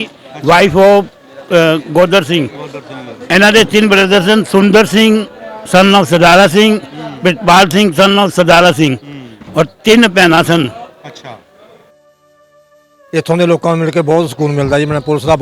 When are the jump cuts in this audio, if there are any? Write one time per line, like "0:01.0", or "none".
0:12.4